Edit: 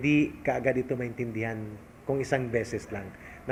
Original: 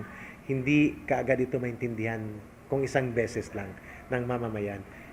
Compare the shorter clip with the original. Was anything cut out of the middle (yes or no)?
no